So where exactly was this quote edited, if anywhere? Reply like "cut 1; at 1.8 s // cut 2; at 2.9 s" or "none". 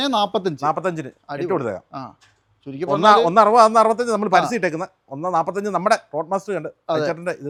none